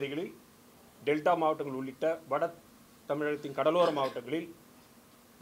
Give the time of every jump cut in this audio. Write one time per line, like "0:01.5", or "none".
none